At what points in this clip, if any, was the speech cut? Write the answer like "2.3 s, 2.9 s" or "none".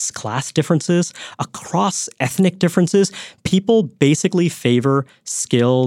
none